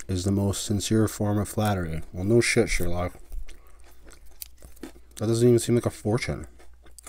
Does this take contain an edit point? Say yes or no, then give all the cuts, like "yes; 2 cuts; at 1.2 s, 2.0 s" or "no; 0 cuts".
no; 0 cuts